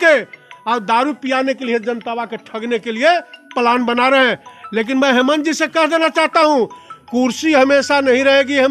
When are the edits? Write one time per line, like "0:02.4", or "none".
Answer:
none